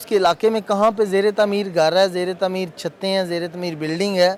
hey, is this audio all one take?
yes; 0 cuts

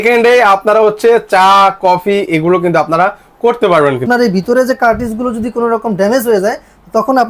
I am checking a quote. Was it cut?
yes; 1 cut; at 4.0 s

